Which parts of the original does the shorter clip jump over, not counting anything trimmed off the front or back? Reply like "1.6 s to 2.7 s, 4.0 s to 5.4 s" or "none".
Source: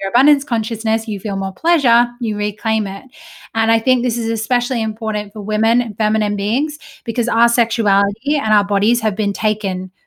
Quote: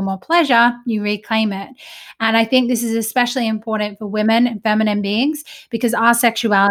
none